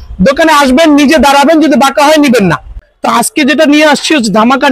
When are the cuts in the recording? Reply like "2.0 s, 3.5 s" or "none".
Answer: 2.8 s

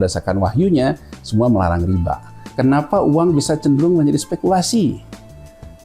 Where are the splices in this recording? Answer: 2.4 s

